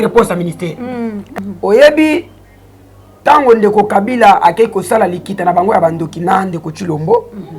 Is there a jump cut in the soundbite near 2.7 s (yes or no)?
no